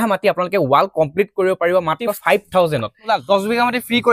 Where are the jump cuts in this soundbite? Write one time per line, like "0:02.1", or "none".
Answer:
0:02.2
0:03.1